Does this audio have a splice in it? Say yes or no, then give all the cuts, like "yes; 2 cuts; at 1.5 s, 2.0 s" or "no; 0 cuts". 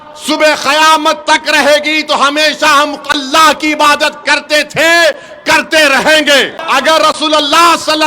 yes; 1 cut; at 6.6 s